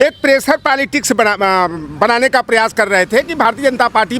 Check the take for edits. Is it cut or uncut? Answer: uncut